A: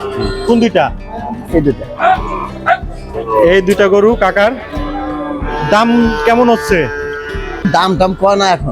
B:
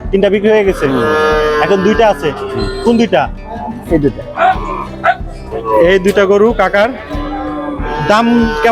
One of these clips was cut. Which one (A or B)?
A